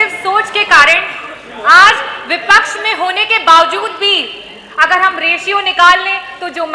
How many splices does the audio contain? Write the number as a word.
zero